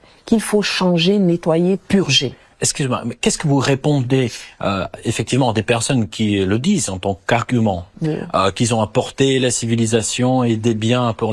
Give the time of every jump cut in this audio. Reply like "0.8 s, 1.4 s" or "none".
7.9 s

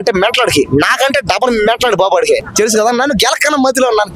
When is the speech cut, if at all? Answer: 2.5 s

